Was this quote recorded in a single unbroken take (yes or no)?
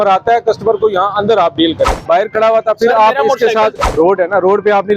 no